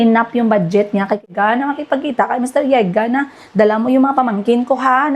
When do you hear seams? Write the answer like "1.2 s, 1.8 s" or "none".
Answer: 1.2 s